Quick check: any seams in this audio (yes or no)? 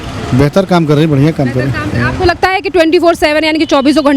no